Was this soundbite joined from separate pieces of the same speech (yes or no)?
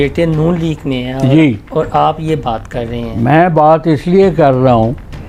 no